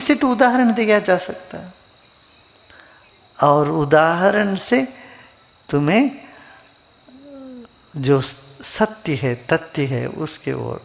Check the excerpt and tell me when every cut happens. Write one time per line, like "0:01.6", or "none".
none